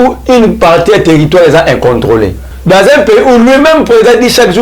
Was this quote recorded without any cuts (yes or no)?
no